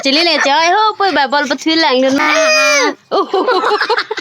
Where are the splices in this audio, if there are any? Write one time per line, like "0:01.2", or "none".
0:02.2

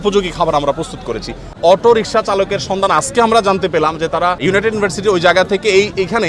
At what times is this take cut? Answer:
0:01.5
0:04.4

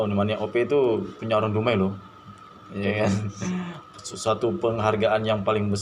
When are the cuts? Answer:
none

